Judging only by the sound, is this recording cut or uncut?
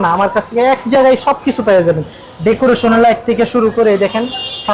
uncut